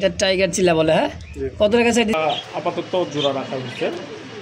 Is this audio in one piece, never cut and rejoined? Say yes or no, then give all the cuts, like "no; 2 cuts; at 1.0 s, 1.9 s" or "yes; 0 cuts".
no; 1 cut; at 2.2 s